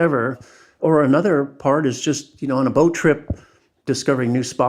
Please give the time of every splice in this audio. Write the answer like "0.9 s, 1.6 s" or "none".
3.7 s